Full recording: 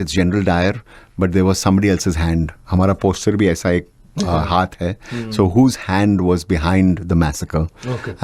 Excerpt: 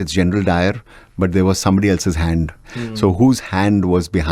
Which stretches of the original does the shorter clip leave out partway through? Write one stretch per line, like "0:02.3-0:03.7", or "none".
0:02.6-0:05.0